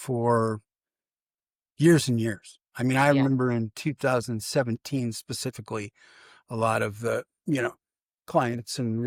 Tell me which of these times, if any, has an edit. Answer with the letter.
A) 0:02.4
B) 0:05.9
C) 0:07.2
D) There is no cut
D